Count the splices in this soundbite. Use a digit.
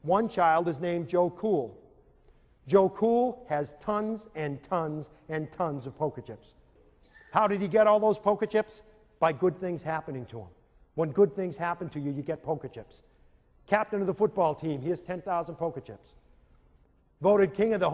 1